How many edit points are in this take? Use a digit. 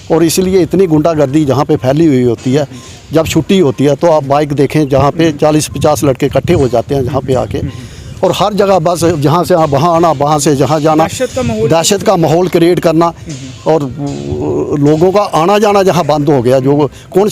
0